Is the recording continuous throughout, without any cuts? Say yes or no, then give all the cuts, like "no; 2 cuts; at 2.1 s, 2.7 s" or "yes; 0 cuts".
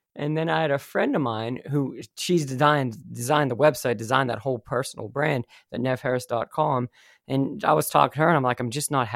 yes; 0 cuts